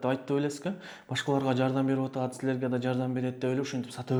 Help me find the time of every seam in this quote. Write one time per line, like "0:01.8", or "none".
none

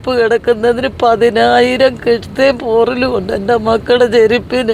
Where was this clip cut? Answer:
none

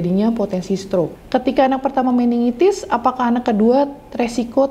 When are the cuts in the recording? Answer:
0:01.2

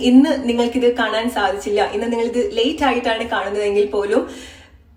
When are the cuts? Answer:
none

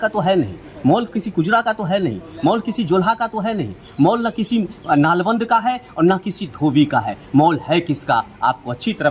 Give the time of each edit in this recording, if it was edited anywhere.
none

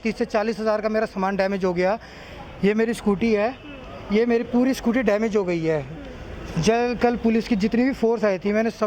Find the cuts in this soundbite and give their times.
none

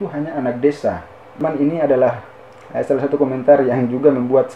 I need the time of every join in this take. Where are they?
0:01.4

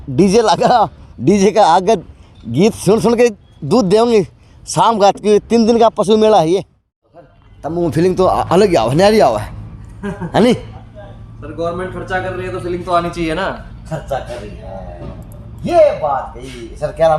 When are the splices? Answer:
0:07.1

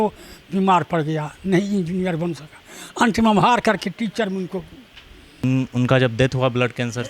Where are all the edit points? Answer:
0:05.4

